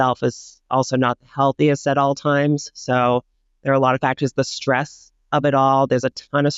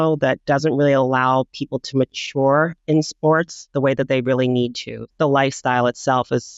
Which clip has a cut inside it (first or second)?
second